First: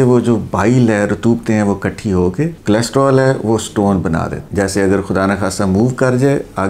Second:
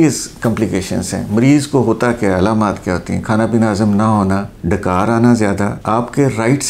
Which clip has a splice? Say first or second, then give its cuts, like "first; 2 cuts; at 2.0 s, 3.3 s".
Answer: first; 2 cuts; at 2.6 s, 4.4 s